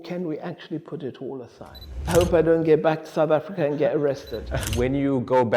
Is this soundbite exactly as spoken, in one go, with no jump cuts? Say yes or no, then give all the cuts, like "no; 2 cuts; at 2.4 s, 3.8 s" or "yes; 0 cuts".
no; 2 cuts; at 2.1 s, 4.6 s